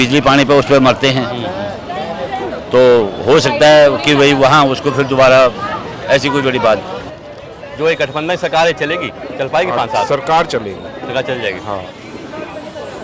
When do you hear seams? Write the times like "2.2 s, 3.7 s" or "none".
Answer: 7.0 s